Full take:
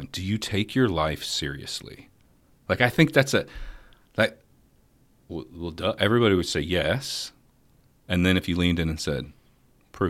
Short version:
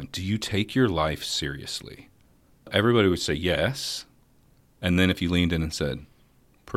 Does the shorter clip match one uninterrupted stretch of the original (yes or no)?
no